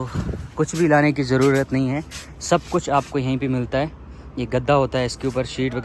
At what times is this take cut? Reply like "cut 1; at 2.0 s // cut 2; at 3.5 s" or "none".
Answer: none

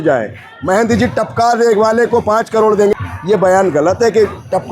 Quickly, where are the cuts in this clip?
cut 1; at 2.9 s

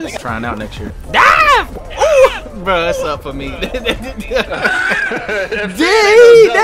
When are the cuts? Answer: cut 1; at 0.9 s

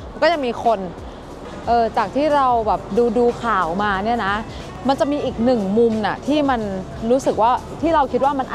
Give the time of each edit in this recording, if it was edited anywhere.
cut 1; at 1.4 s

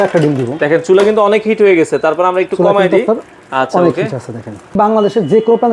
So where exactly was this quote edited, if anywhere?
cut 1; at 4.8 s

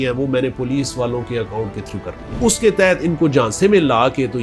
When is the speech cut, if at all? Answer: cut 1; at 2.4 s

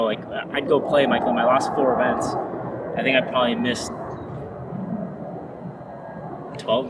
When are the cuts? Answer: none

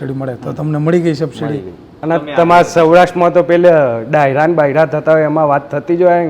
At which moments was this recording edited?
cut 1; at 1.9 s

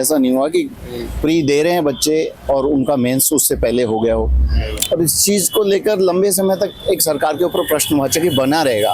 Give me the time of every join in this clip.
cut 1; at 4.7 s

